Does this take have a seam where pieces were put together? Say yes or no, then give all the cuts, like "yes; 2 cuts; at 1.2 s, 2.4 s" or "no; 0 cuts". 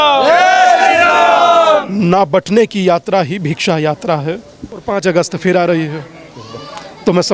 yes; 1 cut; at 4.9 s